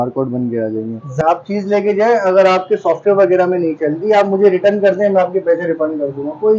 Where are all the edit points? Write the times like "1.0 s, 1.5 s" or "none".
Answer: 1.2 s